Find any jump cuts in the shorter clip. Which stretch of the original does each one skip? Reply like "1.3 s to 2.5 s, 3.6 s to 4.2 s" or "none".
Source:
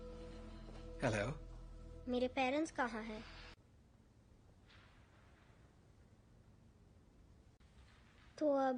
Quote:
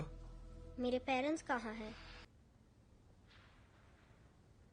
3.6 s to 3.7 s